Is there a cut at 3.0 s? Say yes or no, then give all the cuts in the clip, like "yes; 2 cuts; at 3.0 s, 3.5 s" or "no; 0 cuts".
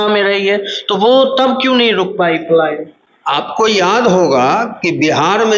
no; 0 cuts